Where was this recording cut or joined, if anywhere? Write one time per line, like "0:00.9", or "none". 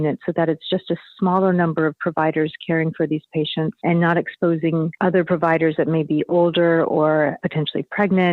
0:03.8
0:04.9
0:07.4